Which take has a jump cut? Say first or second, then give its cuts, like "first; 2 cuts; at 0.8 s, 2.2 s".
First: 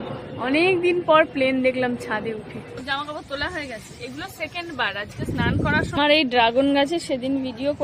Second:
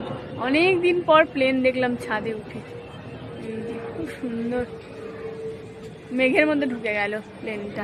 first; 2 cuts; at 2.8 s, 6.0 s